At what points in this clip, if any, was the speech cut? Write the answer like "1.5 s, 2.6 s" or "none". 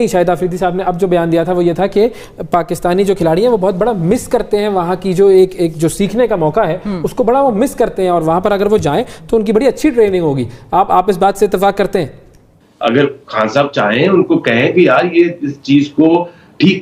12.5 s